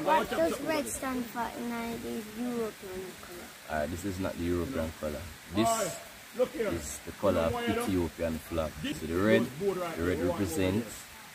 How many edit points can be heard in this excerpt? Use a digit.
1